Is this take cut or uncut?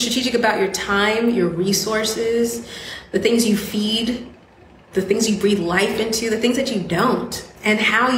uncut